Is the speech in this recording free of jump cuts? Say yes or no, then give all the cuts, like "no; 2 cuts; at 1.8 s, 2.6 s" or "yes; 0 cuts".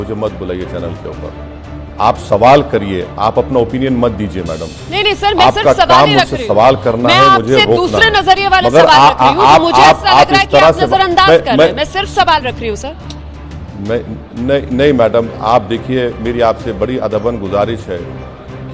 yes; 0 cuts